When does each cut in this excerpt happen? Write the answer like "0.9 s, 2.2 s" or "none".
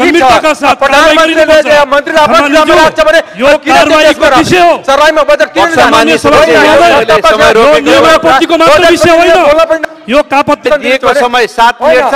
10.6 s